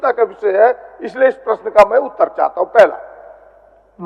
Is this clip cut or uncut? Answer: uncut